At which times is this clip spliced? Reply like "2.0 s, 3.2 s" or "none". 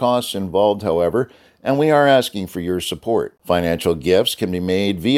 none